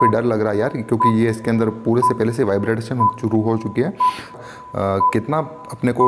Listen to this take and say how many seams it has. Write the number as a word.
one